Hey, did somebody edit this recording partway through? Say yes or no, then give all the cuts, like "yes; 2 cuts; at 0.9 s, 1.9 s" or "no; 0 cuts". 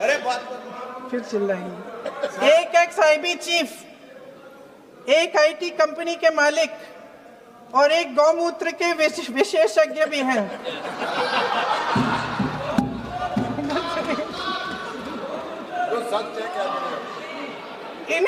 no; 0 cuts